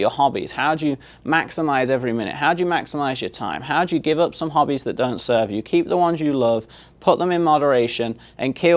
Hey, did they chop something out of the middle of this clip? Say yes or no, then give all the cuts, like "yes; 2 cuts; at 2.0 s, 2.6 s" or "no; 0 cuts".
no; 0 cuts